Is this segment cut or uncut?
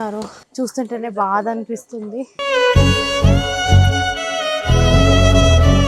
uncut